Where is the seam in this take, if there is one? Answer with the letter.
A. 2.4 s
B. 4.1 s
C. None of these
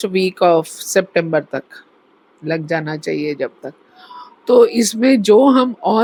C